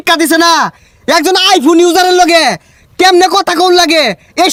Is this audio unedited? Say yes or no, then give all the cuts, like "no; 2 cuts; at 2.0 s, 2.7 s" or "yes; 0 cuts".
yes; 0 cuts